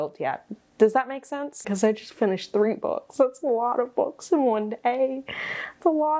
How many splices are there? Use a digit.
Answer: 1